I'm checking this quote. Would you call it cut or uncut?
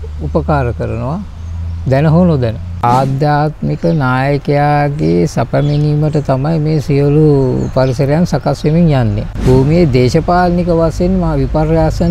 cut